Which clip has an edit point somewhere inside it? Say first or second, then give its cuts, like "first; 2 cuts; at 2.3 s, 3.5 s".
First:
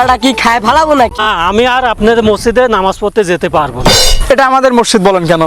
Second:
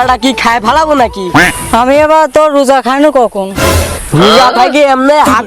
first; 1 cut; at 1.3 s